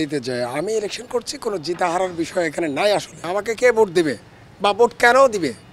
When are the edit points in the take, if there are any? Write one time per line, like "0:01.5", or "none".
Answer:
0:03.3